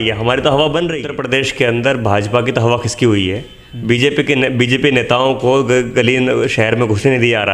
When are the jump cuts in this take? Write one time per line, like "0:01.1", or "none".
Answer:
0:01.2